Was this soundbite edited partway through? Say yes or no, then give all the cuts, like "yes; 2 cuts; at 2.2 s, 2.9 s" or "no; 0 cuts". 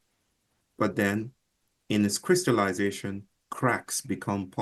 no; 0 cuts